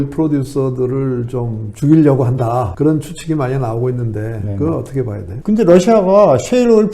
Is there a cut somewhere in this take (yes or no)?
yes